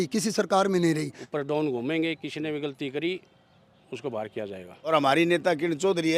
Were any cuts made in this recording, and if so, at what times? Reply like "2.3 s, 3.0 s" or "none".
1.2 s, 4.9 s